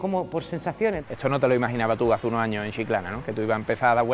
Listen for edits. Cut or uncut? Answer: cut